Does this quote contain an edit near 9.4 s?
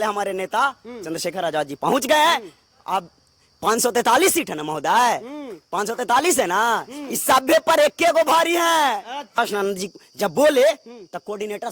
yes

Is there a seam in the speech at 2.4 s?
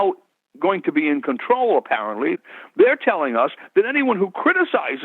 yes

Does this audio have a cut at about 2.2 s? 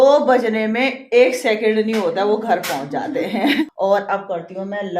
no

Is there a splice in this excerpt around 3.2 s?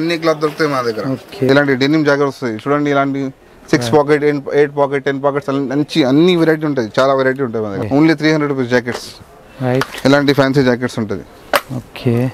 no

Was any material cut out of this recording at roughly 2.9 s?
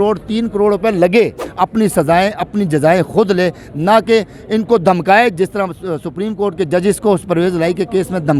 no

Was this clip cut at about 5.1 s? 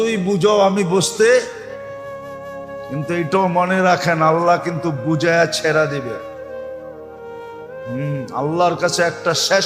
no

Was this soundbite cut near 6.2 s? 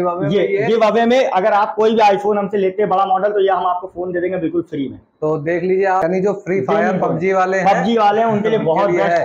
yes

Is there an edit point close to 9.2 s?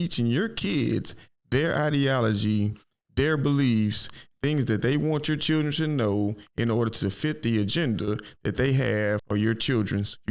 yes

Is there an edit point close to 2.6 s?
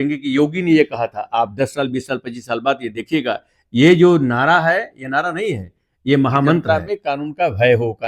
no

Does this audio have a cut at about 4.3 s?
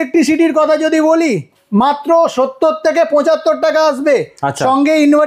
no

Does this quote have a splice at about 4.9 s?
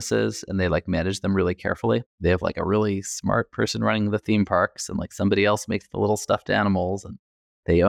no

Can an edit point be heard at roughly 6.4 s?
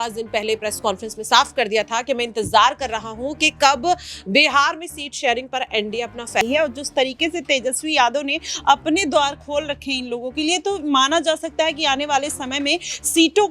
yes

